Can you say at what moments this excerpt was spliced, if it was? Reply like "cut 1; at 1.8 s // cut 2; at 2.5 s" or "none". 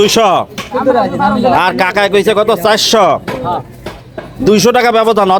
none